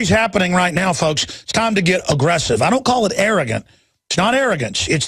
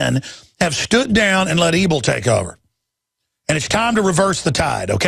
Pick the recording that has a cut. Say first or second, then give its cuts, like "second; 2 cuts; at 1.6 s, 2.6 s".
second; 1 cut; at 3.1 s